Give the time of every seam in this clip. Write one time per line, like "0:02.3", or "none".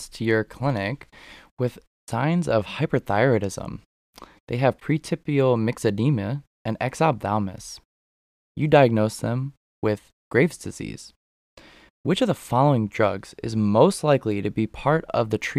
0:01.9